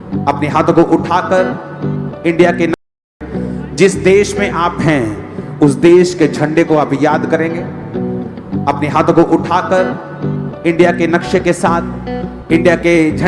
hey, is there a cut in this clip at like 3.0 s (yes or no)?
yes